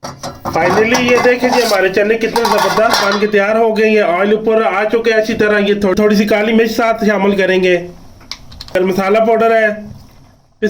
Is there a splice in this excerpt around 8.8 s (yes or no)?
yes